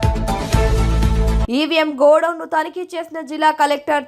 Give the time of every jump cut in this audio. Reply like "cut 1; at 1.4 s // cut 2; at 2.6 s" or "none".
cut 1; at 1.4 s